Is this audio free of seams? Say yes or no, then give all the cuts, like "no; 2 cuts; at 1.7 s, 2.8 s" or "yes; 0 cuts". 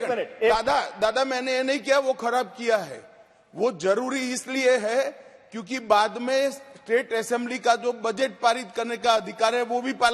yes; 0 cuts